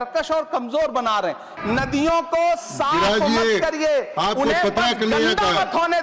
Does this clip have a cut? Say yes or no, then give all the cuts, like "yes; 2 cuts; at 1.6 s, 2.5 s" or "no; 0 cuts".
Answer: yes; 1 cut; at 1.5 s